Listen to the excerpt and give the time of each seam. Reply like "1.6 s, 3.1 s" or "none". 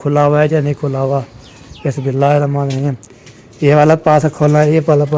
none